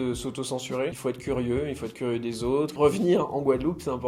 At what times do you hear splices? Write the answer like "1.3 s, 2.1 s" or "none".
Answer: 0.9 s, 2.7 s